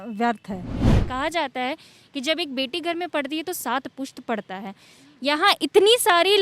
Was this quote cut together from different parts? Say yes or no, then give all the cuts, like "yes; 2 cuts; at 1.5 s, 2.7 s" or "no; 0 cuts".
yes; 1 cut; at 1.1 s